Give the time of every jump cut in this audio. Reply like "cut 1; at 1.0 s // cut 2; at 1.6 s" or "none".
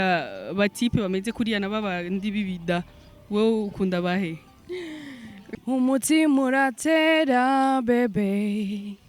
cut 1; at 5.4 s